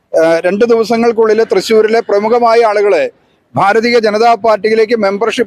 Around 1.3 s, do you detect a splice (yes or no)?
no